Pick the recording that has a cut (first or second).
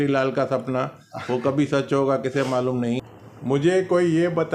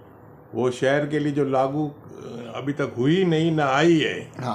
first